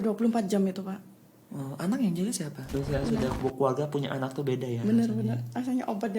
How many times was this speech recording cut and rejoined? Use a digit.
1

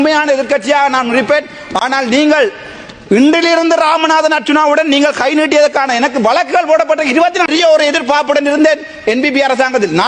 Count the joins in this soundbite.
1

